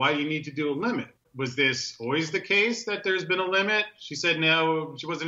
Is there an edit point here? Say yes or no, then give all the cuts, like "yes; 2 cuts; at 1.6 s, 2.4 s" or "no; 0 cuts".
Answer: yes; 1 cut; at 1.2 s